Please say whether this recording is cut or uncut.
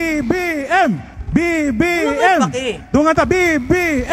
cut